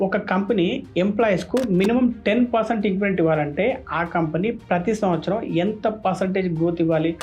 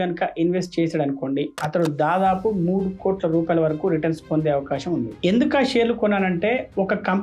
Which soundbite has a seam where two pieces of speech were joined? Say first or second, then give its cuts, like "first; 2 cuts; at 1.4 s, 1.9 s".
second; 1 cut; at 5.1 s